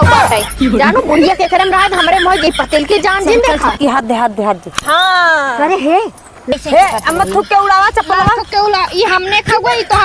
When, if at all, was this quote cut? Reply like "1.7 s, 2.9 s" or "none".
6.5 s